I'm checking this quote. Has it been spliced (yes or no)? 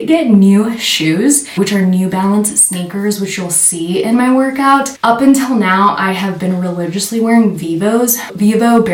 no